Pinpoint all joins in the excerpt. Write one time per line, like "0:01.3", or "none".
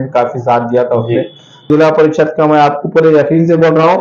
0:01.7